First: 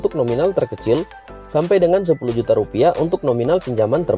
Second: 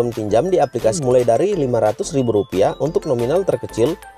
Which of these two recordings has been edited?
second; 1 cut; at 0.9 s

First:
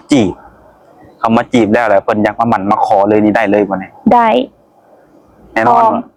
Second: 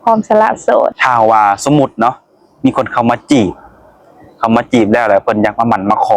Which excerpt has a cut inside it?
second; 1 cut; at 1.0 s

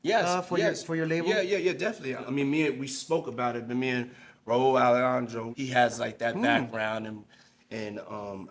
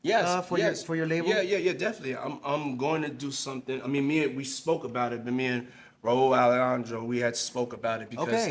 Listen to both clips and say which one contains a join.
first; 2 cuts; at 2.2 s, 5.5 s

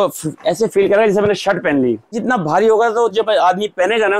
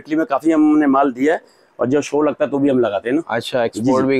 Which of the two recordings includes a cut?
first; 1 cut; at 2.2 s

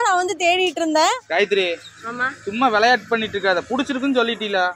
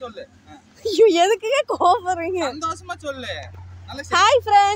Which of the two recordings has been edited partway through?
first; 1 cut; at 1.3 s

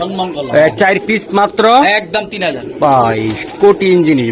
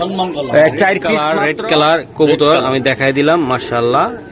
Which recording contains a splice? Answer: second; 1 cut; at 1.2 s

